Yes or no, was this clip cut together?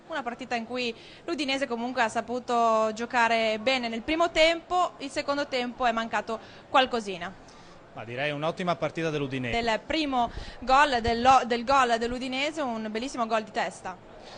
no